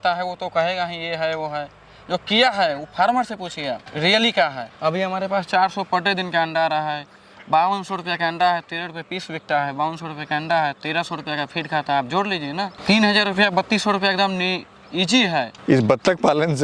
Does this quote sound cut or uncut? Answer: cut